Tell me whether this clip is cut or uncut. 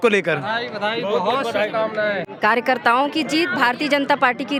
uncut